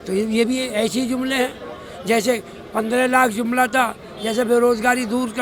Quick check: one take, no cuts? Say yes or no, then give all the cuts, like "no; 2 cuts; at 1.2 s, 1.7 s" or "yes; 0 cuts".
yes; 0 cuts